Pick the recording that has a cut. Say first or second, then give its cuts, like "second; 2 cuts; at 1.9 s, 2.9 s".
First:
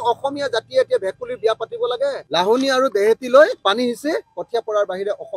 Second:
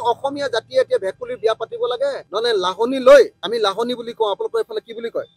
first; 1 cut; at 2.2 s